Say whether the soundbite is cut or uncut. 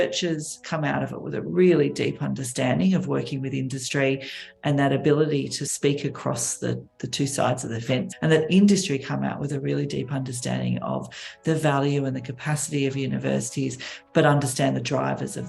uncut